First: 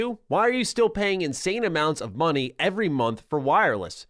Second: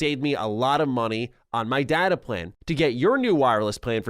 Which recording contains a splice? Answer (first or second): second